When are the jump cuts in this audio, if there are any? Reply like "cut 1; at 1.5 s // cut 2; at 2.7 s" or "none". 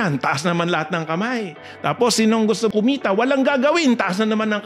cut 1; at 2.7 s